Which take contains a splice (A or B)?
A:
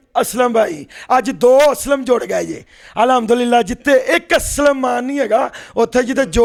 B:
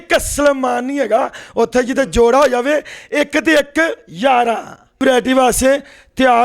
B